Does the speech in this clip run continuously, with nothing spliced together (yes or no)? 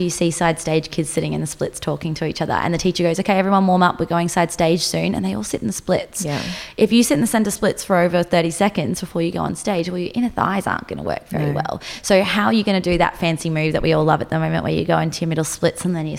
yes